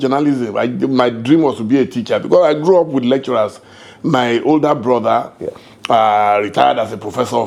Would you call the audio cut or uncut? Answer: uncut